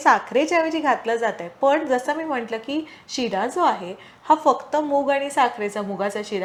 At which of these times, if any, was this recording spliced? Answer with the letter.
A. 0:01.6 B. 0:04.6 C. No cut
C